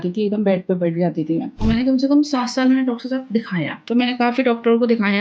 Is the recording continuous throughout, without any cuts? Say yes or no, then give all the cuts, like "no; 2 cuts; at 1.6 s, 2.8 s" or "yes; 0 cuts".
no; 2 cuts; at 1.6 s, 3.8 s